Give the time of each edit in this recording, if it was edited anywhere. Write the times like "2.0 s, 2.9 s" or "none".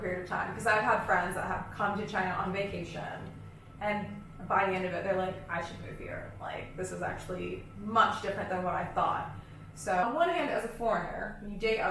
10.0 s